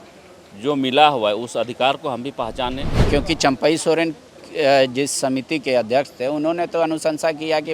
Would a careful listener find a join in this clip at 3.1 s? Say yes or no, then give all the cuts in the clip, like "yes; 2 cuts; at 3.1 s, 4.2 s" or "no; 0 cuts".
yes; 1 cut; at 3.1 s